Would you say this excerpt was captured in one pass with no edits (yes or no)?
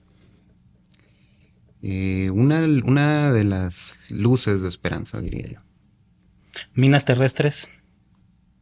yes